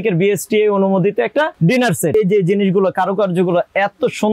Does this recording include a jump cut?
yes; 1 cut; at 2.1 s

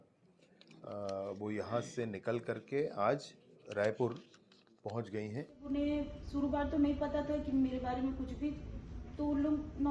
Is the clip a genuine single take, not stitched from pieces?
no; 1 cut; at 5.6 s

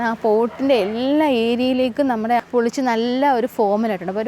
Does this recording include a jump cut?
yes; 1 cut; at 2.4 s

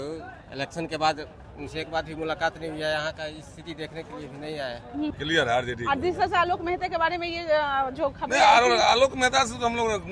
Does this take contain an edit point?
yes; 1 cut; at 5.1 s

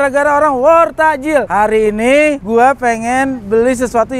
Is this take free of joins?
no; 2 cuts; at 1.5 s, 2.4 s

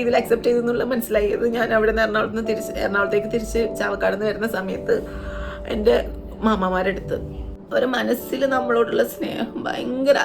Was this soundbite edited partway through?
yes; 1 cut; at 7.5 s

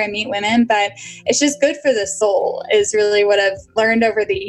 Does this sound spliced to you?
yes; 2 cuts; at 2.1 s, 3.6 s

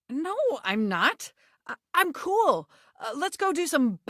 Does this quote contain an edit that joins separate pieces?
no; 0 cuts

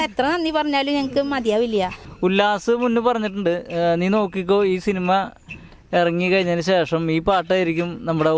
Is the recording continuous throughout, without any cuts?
no; 1 cut; at 2.0 s

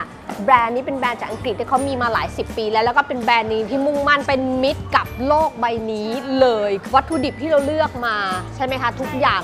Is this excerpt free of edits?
yes; 0 cuts

